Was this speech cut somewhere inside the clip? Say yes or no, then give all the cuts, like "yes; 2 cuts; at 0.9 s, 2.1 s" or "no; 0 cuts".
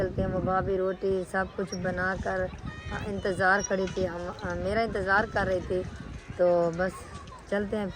no; 0 cuts